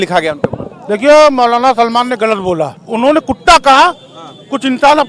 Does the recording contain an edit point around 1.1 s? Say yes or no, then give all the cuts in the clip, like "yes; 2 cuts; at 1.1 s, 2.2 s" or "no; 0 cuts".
no; 1 cut; at 2.8 s